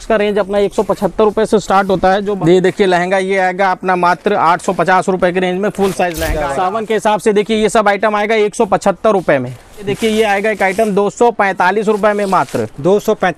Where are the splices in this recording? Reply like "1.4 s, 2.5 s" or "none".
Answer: 2.2 s, 6.3 s, 9.9 s